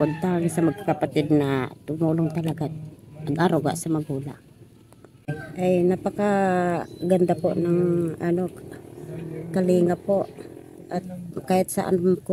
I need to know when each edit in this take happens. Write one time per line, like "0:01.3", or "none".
0:05.4

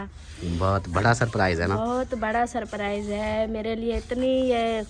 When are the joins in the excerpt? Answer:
none

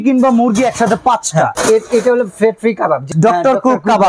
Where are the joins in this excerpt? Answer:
0:01.6
0:03.0

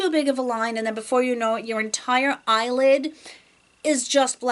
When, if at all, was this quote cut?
none

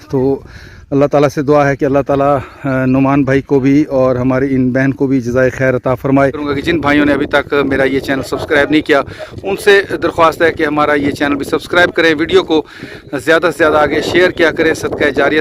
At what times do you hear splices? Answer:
0:06.5

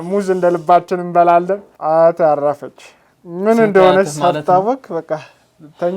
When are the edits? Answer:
0:01.7

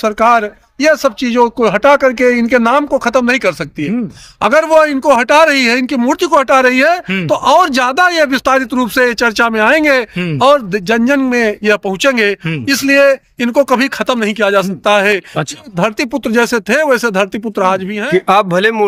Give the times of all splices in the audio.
0:17.9

